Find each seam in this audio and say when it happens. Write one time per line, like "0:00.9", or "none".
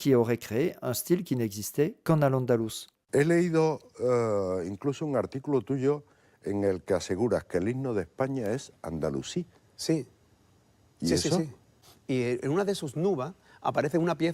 0:02.9